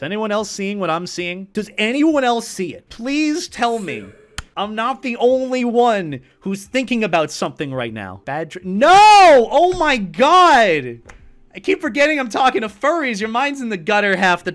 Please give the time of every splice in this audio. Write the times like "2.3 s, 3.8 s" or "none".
1.4 s